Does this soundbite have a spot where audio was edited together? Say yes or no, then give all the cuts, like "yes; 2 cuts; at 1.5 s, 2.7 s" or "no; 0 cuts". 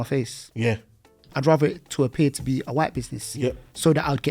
yes; 1 cut; at 1.3 s